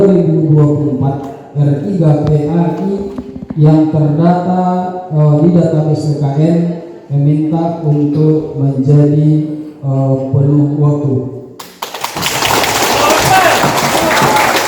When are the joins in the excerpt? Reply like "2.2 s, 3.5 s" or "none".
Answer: none